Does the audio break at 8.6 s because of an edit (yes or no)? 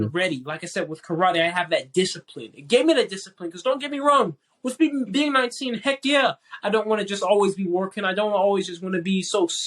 no